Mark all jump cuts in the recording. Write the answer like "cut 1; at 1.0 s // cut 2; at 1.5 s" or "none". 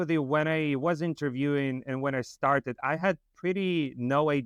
none